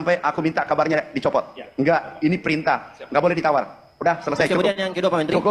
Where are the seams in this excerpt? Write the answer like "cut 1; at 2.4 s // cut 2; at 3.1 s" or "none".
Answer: none